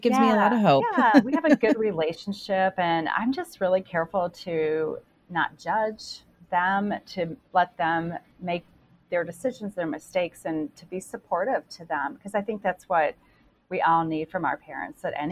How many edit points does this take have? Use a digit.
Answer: 0